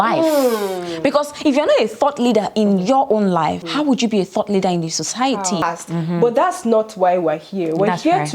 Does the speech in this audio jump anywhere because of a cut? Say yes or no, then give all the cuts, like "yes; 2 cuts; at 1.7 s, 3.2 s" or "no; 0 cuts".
yes; 2 cuts; at 3.6 s, 5.6 s